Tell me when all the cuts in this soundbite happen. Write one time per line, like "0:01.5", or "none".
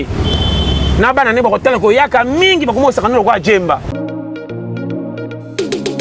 0:03.9